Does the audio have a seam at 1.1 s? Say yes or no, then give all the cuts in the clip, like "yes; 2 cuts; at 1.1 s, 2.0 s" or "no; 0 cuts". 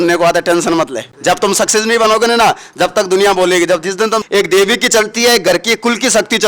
yes; 2 cuts; at 1.1 s, 4.2 s